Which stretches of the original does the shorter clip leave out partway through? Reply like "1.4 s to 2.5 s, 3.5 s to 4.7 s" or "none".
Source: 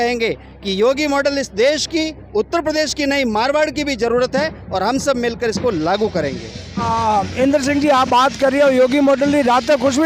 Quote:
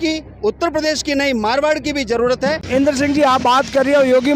4.6 s to 7.3 s